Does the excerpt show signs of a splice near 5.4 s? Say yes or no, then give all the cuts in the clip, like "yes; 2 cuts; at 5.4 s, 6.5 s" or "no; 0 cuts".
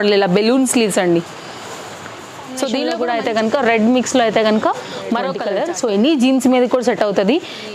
yes; 2 cuts; at 2.9 s, 5.4 s